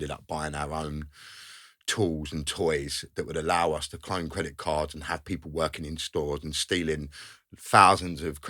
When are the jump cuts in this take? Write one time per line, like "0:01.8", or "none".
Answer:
none